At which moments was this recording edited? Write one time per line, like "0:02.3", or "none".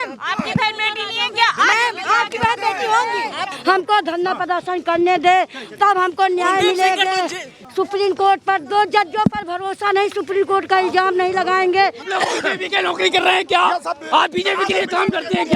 0:03.6
0:07.6
0:12.0